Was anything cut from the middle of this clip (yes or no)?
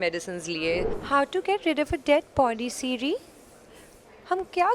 yes